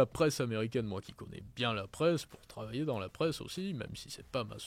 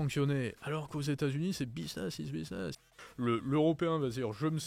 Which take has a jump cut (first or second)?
second